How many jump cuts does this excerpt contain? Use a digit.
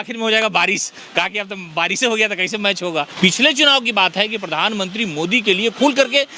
1